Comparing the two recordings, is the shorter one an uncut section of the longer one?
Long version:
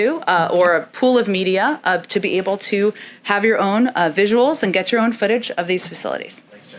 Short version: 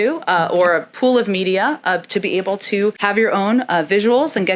no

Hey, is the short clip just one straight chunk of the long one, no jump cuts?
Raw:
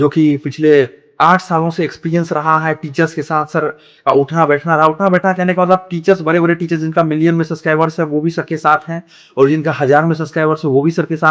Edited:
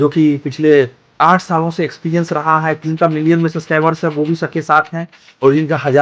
no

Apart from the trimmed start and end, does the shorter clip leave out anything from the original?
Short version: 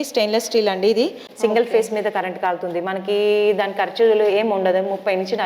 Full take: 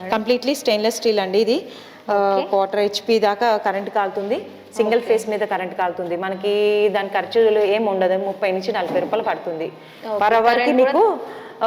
yes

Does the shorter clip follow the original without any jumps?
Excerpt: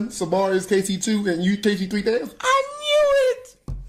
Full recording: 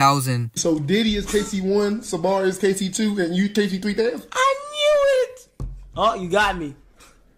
yes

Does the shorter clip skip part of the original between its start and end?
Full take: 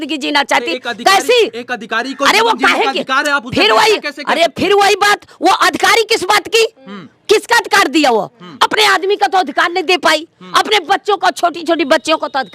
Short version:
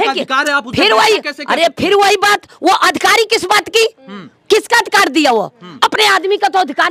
no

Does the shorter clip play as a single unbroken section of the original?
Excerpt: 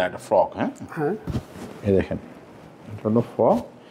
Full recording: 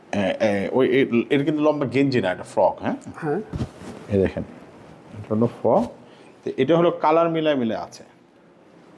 yes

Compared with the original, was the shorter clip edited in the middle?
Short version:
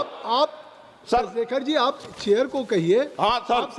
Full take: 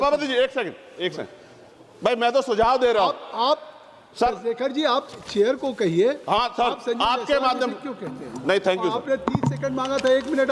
no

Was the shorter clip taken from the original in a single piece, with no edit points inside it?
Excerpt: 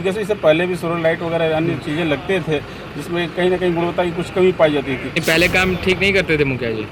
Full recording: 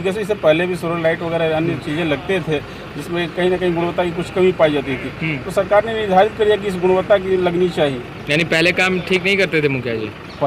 no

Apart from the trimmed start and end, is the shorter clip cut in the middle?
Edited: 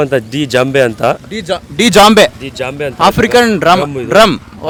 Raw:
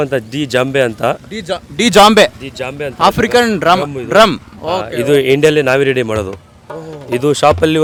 no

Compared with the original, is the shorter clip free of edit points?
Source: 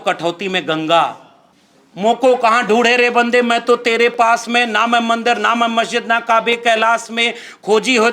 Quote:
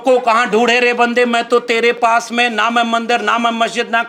yes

